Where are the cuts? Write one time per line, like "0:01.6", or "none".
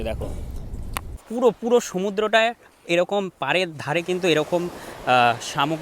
0:01.2

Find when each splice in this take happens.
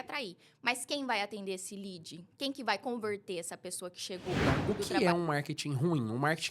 0:04.6

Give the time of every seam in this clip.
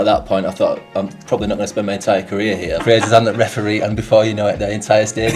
0:02.8

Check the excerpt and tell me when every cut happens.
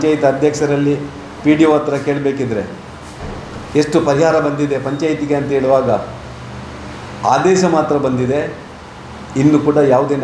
none

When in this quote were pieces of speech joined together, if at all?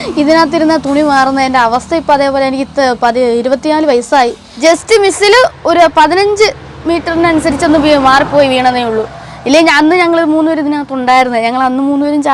0:04.4

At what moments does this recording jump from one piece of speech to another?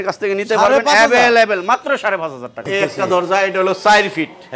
0:02.6

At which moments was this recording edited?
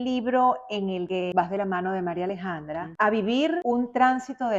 0:01.1
0:02.9
0:03.6

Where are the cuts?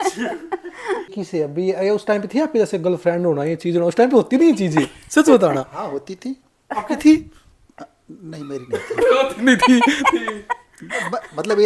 0:01.2

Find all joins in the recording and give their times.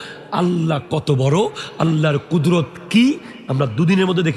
none

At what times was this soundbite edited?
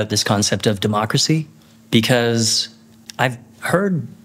none

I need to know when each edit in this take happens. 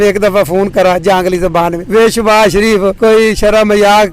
0:01.8
0:02.9

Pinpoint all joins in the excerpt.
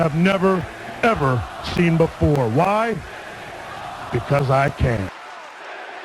0:05.1

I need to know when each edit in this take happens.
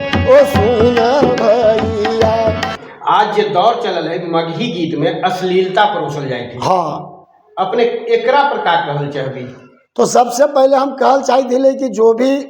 0:02.7

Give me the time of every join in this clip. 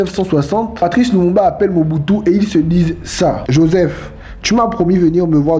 0:03.4

